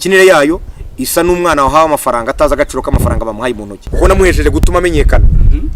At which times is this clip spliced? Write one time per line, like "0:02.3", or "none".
0:03.9